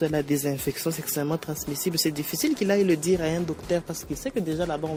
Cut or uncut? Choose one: uncut